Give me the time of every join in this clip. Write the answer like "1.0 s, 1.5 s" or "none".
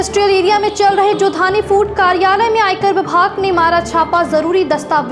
none